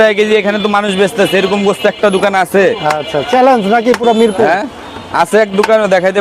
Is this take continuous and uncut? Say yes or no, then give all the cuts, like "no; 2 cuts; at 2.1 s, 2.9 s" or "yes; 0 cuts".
yes; 0 cuts